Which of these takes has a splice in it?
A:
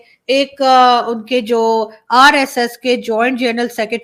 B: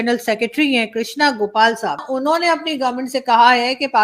B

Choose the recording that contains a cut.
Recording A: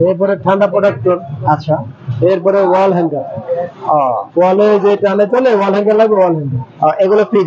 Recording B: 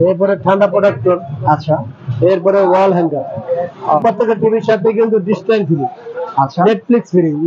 B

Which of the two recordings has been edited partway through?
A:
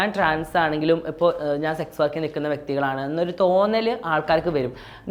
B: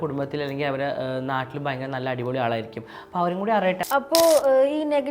B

